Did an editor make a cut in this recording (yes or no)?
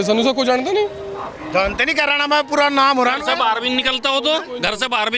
no